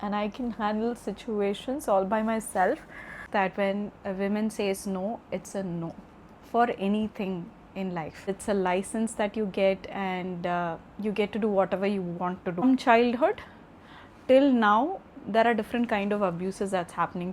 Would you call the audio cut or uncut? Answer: cut